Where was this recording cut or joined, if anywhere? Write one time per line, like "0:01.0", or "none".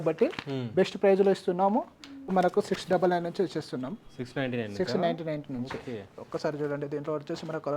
0:02.3